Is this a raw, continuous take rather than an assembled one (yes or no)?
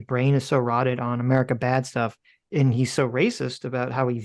no